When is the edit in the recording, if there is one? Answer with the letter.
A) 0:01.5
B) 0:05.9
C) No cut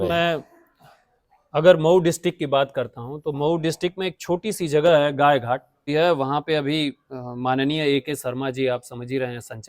B